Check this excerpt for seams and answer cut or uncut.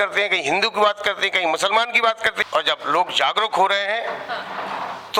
cut